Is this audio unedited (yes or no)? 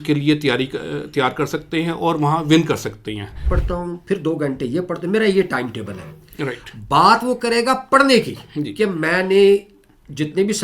no